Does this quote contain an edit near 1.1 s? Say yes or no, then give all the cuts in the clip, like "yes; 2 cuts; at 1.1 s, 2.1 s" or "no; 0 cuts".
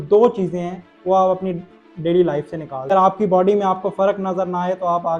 no; 1 cut; at 2.9 s